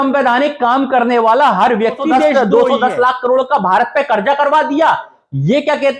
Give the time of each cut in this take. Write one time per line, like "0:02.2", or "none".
0:02.3